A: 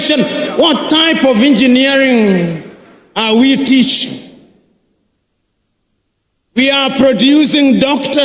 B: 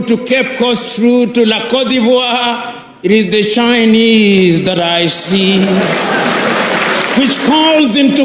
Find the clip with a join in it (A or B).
B